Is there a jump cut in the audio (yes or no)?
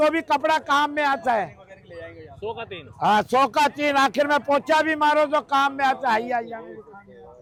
no